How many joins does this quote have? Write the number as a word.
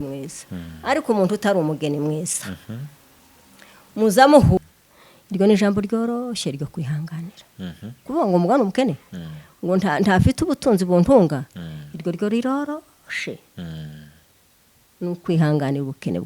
one